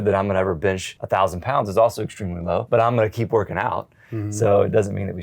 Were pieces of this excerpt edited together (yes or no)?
yes